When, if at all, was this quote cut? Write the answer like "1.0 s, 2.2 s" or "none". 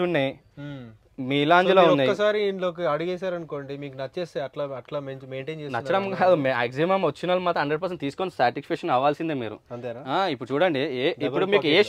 none